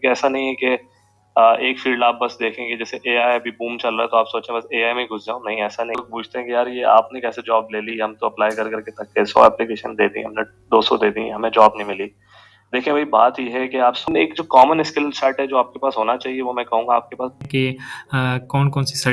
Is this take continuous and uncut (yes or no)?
no